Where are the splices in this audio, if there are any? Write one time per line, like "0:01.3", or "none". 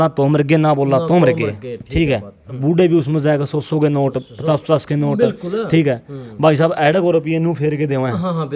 0:02.6